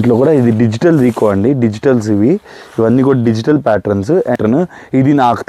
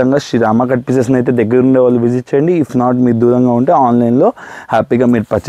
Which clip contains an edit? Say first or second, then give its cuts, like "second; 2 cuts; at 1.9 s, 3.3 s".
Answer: first; 1 cut; at 4.4 s